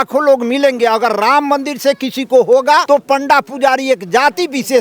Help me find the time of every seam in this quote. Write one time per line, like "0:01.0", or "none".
0:02.8